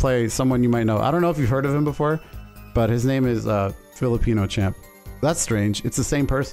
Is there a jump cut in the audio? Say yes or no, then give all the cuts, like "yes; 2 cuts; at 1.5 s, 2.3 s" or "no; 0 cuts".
no; 0 cuts